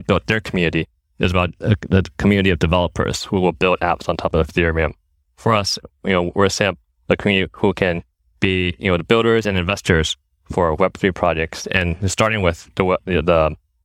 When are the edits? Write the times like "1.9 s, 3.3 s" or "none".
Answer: none